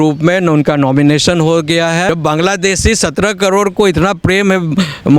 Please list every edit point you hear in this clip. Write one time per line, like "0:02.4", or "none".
0:02.1